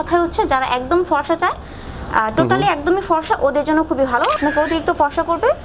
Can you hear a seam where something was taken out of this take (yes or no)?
yes